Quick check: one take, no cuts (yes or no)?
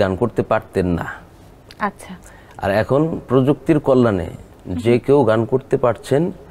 yes